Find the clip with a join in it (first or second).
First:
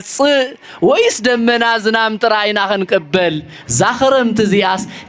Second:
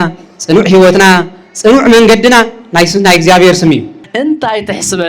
second